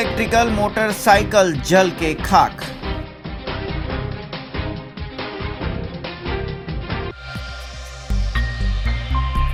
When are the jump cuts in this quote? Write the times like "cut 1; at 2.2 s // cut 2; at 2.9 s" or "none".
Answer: none